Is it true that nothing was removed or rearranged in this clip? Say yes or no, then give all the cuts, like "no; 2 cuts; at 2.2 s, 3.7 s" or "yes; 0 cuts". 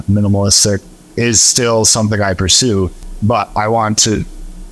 no; 2 cuts; at 1.0 s, 3.0 s